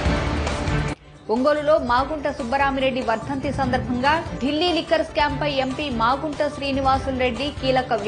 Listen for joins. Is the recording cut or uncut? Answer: cut